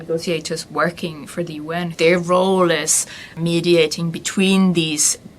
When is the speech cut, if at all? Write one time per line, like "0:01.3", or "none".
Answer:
0:01.9
0:03.4